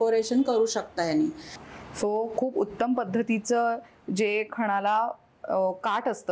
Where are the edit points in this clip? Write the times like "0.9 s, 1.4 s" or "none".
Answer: 1.6 s